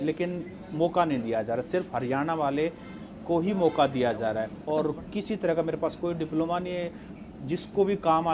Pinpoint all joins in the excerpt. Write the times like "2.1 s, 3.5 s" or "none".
4.5 s